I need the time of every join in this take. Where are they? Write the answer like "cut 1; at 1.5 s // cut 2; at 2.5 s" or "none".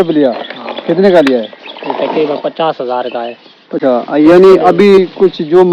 cut 1; at 3.8 s